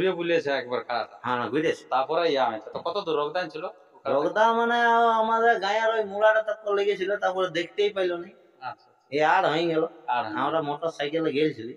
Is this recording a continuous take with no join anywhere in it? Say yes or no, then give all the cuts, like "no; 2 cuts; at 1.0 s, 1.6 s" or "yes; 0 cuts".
yes; 0 cuts